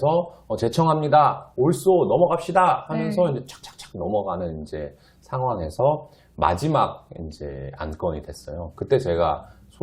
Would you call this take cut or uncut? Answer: uncut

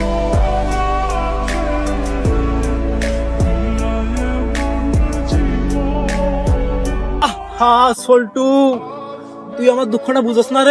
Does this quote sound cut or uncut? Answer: cut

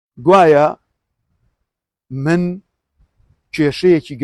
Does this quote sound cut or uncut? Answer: uncut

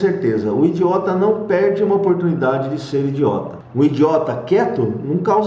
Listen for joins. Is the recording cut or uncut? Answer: cut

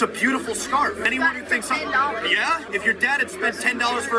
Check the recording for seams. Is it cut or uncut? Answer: cut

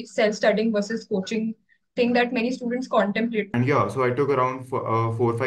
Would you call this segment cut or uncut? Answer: cut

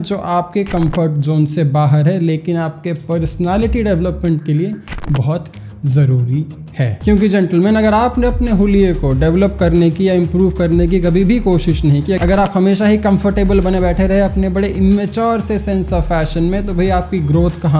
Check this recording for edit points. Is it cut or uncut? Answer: cut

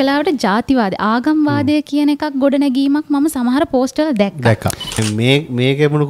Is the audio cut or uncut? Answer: cut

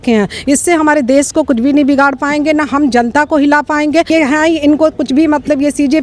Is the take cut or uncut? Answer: cut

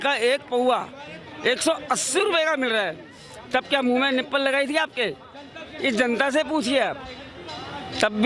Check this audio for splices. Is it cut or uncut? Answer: uncut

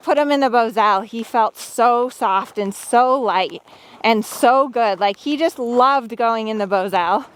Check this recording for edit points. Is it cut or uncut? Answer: uncut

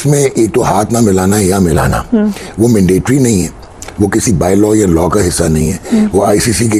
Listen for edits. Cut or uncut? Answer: uncut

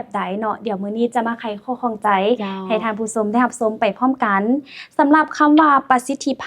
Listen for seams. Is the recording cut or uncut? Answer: uncut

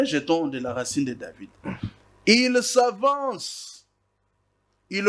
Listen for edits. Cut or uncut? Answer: uncut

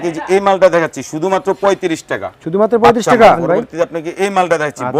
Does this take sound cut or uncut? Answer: cut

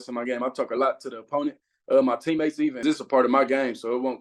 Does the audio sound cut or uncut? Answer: cut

